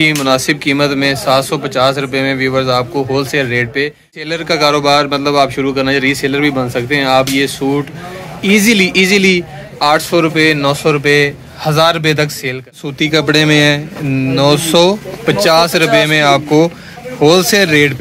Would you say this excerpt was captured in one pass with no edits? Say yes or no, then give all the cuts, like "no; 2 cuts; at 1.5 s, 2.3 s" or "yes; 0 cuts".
no; 2 cuts; at 4.3 s, 12.9 s